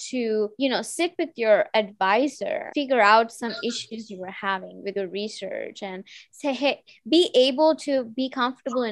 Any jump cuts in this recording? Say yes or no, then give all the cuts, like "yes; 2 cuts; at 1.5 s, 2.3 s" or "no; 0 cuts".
no; 0 cuts